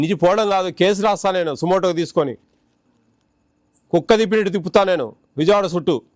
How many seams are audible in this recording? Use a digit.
0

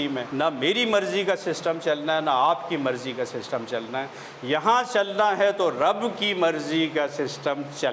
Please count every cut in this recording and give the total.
0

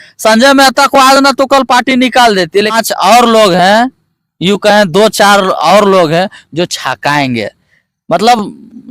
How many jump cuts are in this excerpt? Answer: 1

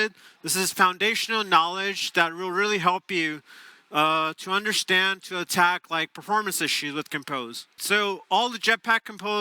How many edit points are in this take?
1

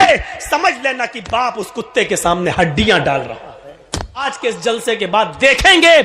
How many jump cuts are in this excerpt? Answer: 1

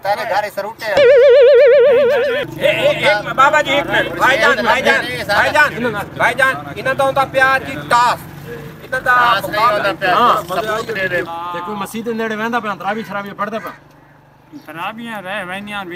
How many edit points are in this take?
2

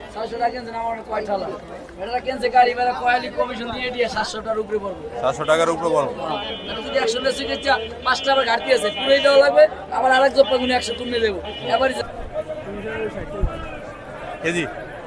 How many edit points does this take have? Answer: 1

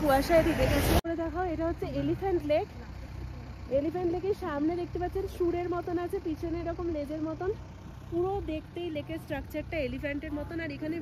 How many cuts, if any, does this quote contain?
1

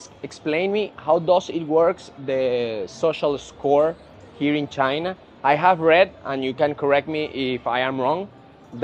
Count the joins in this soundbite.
0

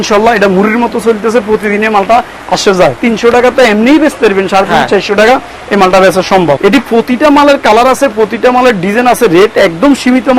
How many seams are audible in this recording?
2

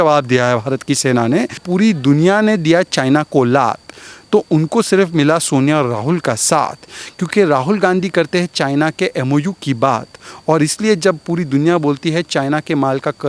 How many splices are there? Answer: 1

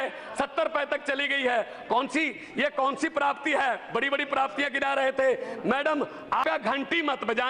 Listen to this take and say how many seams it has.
1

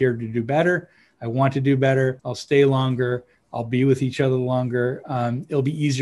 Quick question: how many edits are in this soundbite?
1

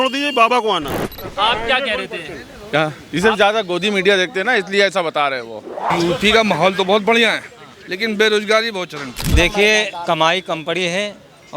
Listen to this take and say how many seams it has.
3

